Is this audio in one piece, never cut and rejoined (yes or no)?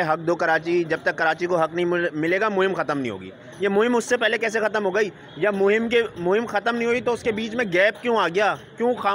yes